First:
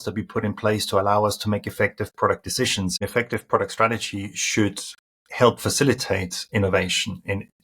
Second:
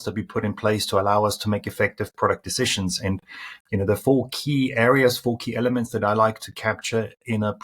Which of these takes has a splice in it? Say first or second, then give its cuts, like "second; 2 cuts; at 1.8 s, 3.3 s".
first; 1 cut; at 3.0 s